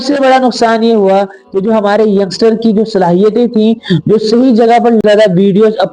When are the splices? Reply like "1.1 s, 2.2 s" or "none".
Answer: 5.0 s